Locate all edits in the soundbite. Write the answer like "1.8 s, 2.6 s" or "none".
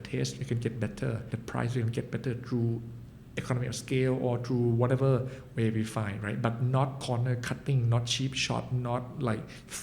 1.3 s, 7.0 s